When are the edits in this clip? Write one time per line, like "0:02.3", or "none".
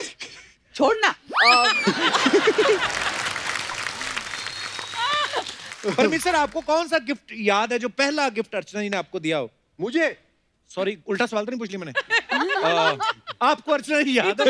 0:05.6